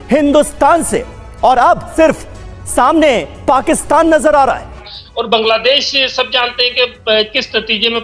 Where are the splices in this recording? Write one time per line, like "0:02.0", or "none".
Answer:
0:01.9
0:05.0